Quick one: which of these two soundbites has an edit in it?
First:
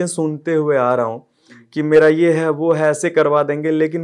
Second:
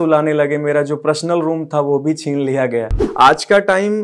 second; 1 cut; at 3.0 s

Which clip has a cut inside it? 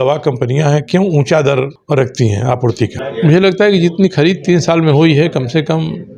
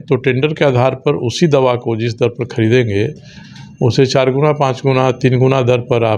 first; 2 cuts; at 1.8 s, 3.0 s

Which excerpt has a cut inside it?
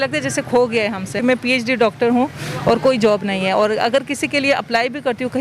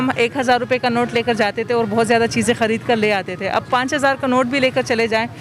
first; 1 cut; at 1.2 s

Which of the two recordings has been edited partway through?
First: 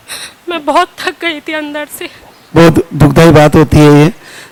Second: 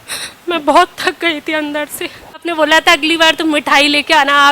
second; 1 cut; at 2.5 s

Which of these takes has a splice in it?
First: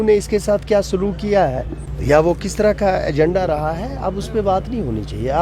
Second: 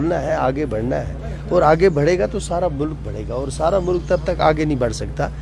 first; 1 cut; at 1.4 s

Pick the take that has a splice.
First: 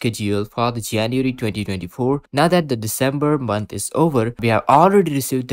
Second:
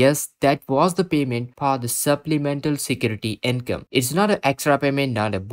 first; 1 cut; at 4.4 s

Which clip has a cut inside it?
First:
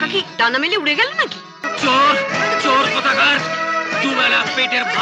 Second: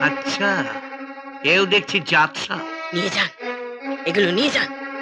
first; 1 cut; at 1.7 s

